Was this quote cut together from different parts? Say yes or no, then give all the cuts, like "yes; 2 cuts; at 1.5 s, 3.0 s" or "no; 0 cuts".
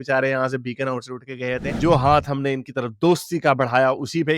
yes; 1 cut; at 1.7 s